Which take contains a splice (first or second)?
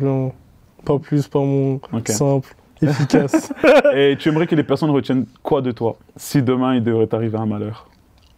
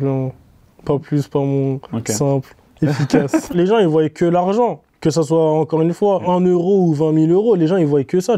second